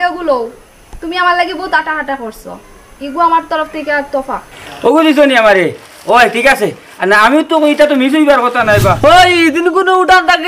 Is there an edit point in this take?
yes; 1 cut; at 9.0 s

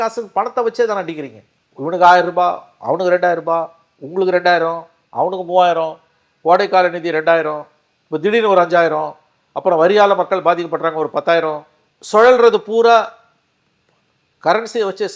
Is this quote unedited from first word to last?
yes; 0 cuts

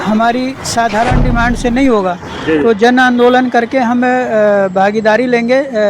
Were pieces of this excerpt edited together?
no; 0 cuts

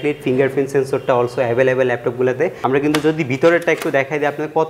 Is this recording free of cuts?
no; 1 cut; at 2.6 s

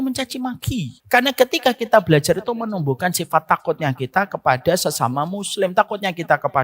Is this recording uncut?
no; 1 cut; at 1.0 s

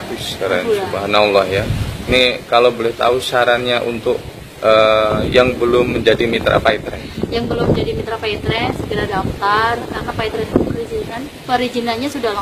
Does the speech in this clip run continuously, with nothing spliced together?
yes; 0 cuts

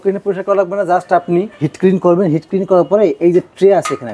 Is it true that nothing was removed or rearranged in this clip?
no; 1 cut; at 1.6 s

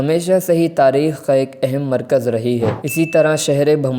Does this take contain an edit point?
yes; 1 cut; at 2.8 s

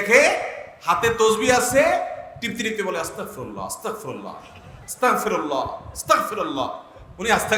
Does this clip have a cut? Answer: no; 0 cuts

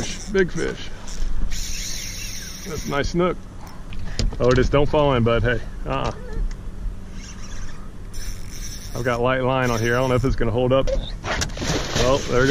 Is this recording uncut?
no; 1 cut; at 10.9 s

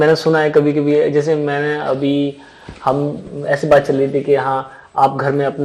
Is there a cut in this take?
no; 0 cuts

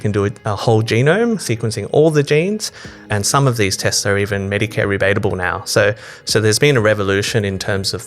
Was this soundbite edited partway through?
yes; 2 cuts; at 1.4 s, 3.0 s

